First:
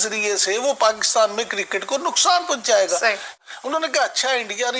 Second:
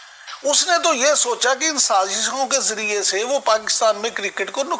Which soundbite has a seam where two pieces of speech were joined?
first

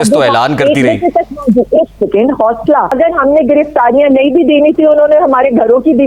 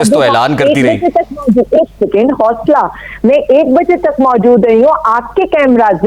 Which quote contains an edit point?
first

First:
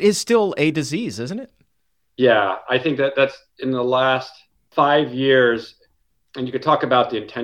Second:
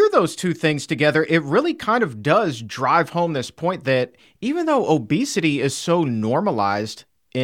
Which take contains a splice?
first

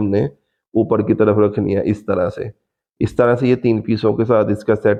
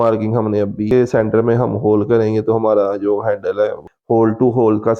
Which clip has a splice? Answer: second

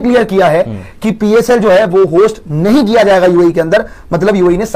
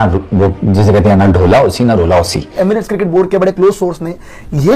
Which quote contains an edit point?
second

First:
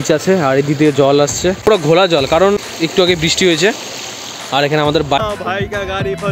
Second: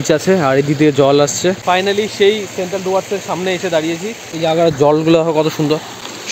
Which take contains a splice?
first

